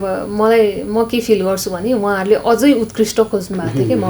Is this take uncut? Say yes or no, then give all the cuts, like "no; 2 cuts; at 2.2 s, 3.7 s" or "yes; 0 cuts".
yes; 0 cuts